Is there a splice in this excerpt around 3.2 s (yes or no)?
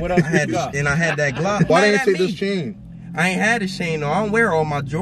no